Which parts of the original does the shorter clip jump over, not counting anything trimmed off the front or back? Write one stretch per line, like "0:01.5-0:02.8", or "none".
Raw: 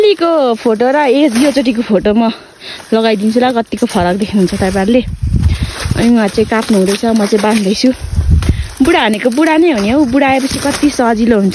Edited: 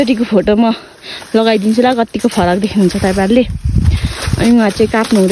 none